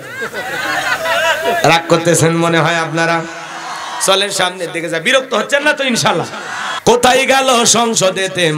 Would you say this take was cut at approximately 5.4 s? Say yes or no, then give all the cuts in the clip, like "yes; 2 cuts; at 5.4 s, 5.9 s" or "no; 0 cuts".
no; 1 cut; at 6.6 s